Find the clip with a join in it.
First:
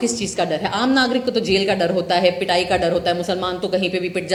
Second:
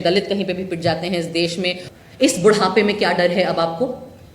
second; 1 cut; at 1.8 s

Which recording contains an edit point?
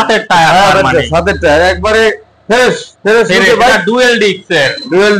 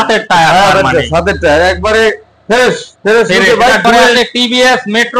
second; 1 cut; at 4.0 s

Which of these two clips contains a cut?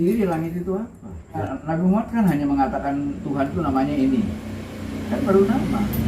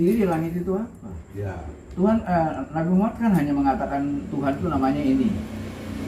first; 1 cut; at 1.5 s

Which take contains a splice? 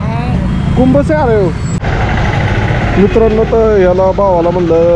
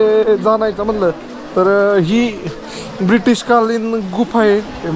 first; 1 cut; at 1.7 s

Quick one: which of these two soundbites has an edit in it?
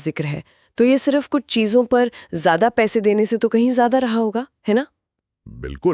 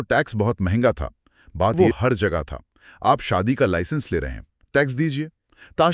second; 1 cut; at 1.8 s

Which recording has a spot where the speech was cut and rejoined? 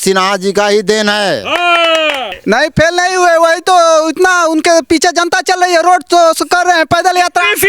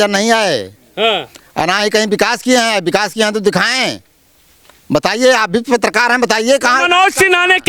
first; 1 cut; at 2.3 s

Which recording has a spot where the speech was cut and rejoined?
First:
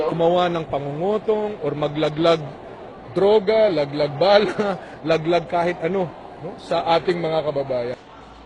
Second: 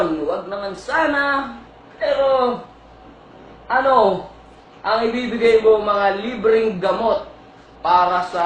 second; 1 cut; at 6.5 s

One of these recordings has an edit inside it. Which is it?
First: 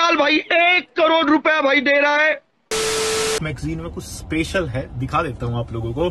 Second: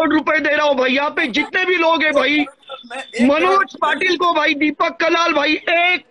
first; 1 cut; at 3.0 s

